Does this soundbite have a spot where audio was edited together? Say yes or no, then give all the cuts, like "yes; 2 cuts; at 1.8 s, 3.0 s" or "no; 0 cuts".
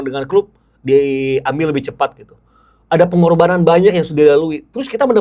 no; 0 cuts